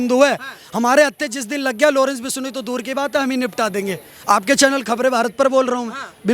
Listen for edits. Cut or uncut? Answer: uncut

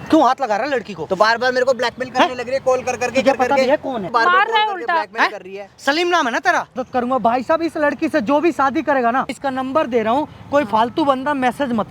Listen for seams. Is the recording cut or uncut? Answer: cut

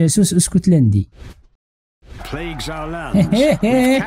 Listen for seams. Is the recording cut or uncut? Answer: cut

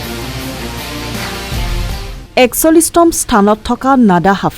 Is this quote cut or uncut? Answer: cut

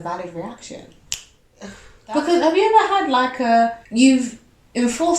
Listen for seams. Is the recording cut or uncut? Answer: cut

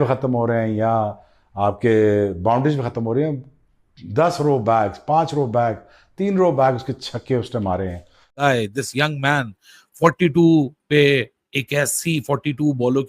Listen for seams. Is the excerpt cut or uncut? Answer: cut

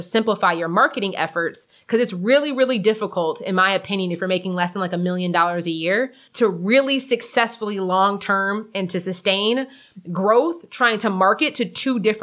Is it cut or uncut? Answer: uncut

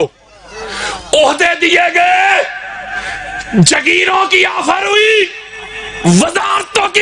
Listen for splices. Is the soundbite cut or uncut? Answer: uncut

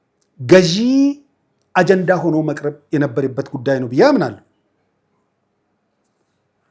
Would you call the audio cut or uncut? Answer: uncut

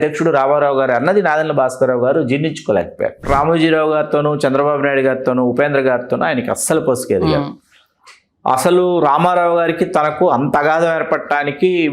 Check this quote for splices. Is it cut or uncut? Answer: cut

